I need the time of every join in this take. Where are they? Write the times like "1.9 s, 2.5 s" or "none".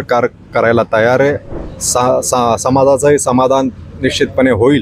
1.5 s